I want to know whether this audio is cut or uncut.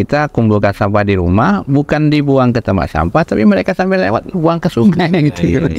uncut